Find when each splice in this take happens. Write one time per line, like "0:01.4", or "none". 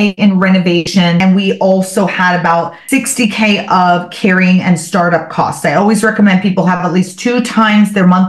0:01.0
0:02.8